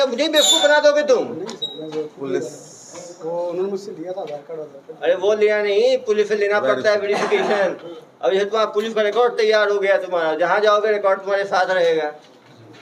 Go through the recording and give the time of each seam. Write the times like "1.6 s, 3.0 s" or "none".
none

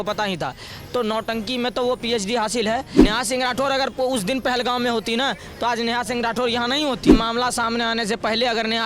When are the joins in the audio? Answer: 3.0 s, 7.1 s

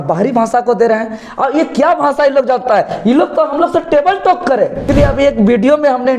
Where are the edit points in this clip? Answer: 4.9 s

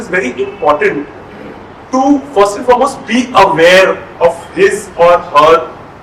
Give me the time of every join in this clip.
none

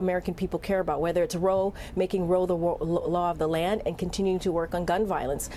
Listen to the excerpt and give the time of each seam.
4.1 s

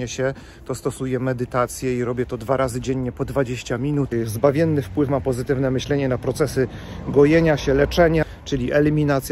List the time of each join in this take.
4.1 s, 8.2 s

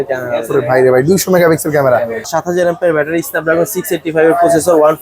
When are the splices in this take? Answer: 2.3 s

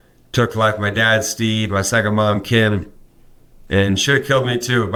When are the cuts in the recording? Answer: none

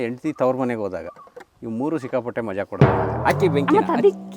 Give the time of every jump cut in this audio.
3.0 s

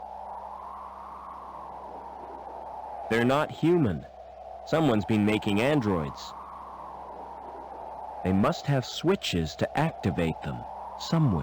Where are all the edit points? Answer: 0.9 s, 3.1 s, 6.1 s, 8.2 s

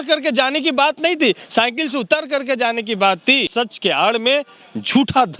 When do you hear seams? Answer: 3.4 s

